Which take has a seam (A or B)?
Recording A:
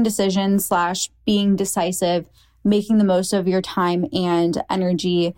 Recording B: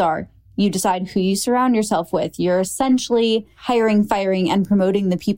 B